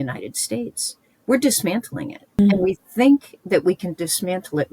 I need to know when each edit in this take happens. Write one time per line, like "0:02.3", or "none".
0:02.3